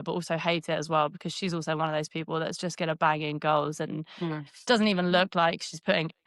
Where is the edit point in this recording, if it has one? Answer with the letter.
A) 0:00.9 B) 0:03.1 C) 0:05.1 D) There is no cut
D